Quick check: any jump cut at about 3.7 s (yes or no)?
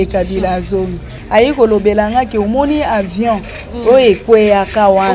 no